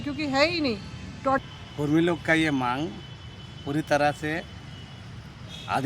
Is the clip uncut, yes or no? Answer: no